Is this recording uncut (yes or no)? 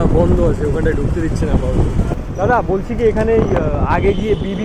yes